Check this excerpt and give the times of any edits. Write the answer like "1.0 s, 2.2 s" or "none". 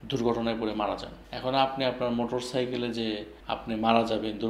1.2 s